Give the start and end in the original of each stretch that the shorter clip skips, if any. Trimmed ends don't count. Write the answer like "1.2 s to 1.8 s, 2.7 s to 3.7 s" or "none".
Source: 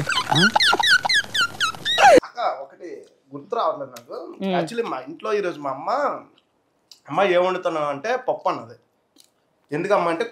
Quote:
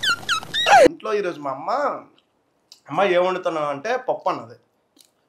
2.3 s to 5.2 s